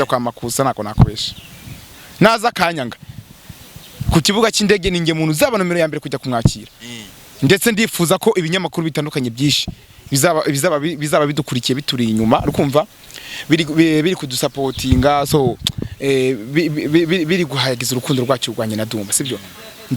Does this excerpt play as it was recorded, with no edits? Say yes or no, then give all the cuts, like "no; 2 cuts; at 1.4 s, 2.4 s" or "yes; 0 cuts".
yes; 0 cuts